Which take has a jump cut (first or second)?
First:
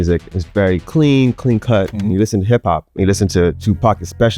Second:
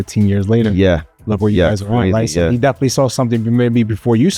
first